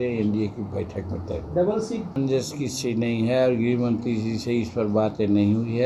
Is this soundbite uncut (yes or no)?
no